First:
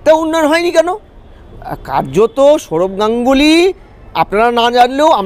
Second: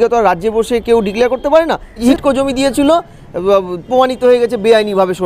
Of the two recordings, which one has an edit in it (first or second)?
second